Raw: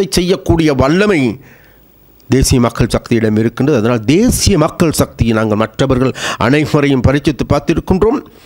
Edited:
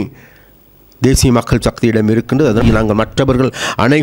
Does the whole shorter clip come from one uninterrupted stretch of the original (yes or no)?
no